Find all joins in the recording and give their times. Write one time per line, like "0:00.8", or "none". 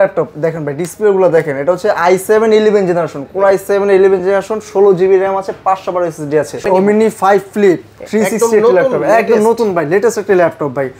0:06.6